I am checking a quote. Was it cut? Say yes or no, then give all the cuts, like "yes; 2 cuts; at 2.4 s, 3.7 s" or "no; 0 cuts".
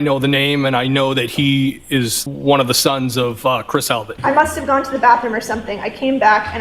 yes; 2 cuts; at 2.2 s, 4.1 s